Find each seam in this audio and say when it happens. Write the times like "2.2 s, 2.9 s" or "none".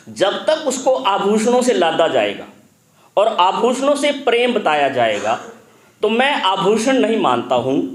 none

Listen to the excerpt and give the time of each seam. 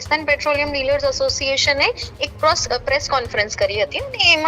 none

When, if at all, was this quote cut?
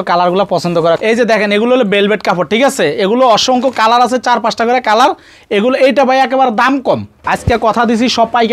1.0 s, 7.2 s

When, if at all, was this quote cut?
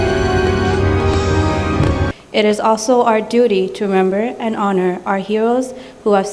2.1 s

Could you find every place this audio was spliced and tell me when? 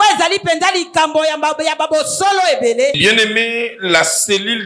3.0 s

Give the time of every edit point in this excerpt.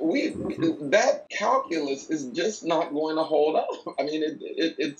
1.3 s

